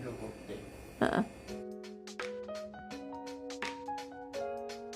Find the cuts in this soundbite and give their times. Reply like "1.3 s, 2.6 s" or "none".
1.4 s, 2.8 s